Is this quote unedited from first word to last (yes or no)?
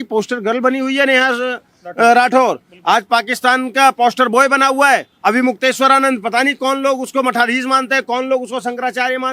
yes